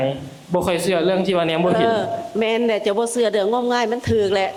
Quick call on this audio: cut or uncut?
uncut